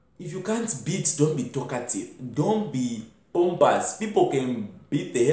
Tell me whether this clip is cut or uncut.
uncut